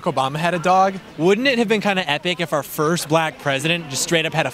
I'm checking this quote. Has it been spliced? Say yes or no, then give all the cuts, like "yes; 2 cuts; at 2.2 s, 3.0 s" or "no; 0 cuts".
no; 0 cuts